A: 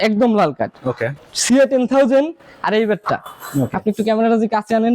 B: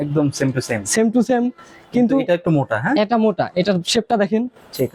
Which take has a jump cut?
A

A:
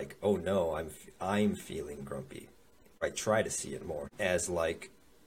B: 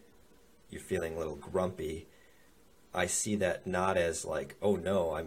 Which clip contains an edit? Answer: A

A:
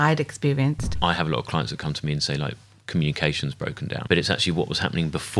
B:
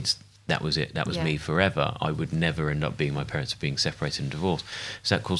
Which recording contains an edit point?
A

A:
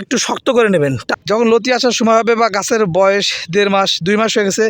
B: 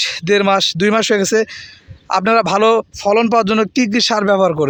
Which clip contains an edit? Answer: A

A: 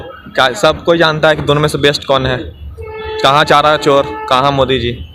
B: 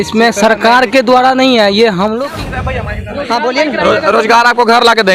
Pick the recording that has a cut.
B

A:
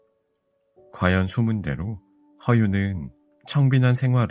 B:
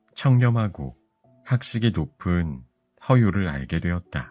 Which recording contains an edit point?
A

